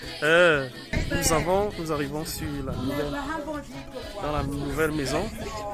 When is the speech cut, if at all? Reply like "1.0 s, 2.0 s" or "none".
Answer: 1.0 s